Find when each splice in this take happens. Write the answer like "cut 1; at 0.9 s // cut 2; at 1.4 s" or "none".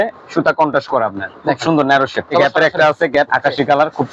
cut 1; at 1.3 s // cut 2; at 2.3 s // cut 3; at 3.3 s